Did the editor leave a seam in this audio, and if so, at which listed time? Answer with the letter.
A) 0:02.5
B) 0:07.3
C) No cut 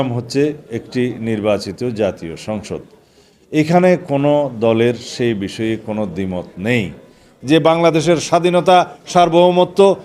B